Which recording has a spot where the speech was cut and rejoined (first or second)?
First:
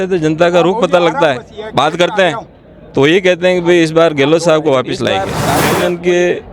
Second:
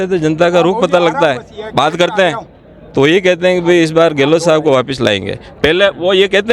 first